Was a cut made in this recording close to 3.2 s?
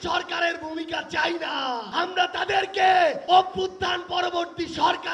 yes; 2 cuts; at 1.9 s, 3.2 s

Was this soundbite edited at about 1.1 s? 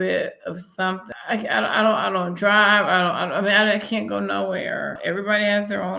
yes; 2 cuts; at 1.1 s, 5.0 s

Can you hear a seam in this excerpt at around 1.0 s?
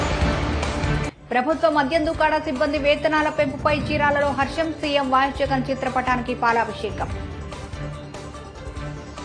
yes; 1 cut; at 1.0 s

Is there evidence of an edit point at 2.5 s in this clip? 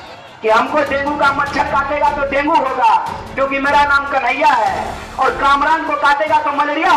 no; 0 cuts

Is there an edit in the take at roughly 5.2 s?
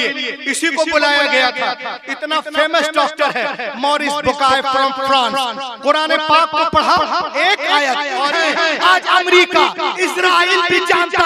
no; 1 cut; at 8.4 s

